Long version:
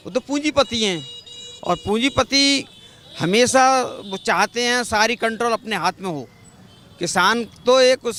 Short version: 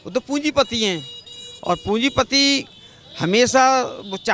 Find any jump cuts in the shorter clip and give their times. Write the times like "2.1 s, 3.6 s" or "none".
none